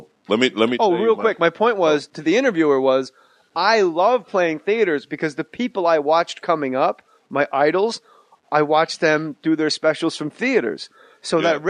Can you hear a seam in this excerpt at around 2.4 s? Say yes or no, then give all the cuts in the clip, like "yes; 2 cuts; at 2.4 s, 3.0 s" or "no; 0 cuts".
yes; 1 cut; at 2.4 s